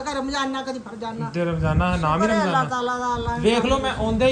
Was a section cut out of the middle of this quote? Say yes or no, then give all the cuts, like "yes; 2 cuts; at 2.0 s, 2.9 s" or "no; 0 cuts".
no; 0 cuts